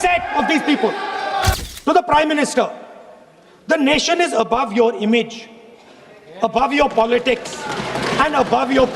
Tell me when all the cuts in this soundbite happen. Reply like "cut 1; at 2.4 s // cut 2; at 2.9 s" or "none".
cut 1; at 1.6 s